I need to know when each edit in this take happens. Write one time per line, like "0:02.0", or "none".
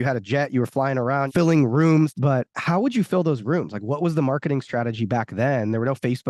0:01.3
0:02.2